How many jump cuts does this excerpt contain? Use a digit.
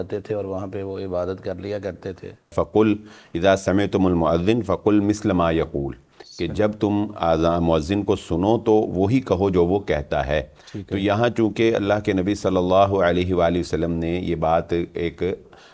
1